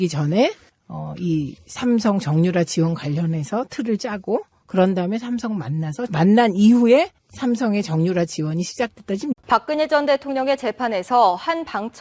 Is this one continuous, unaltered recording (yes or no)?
yes